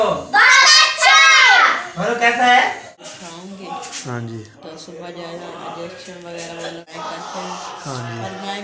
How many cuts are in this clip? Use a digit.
2